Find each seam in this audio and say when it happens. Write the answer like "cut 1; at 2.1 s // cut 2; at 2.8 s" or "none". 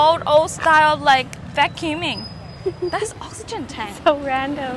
none